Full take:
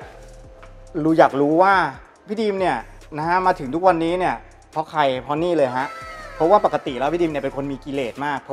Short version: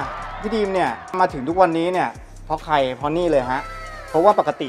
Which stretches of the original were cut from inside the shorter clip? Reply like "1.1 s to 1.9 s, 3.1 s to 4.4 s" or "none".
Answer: 3.0 s to 3.4 s